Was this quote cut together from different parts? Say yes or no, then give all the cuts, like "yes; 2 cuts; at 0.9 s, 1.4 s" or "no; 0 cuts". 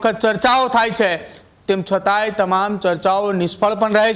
no; 0 cuts